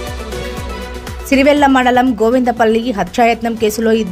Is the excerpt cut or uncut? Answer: cut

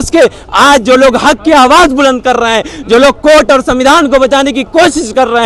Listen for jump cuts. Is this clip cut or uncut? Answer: uncut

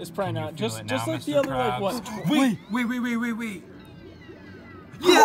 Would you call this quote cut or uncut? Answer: uncut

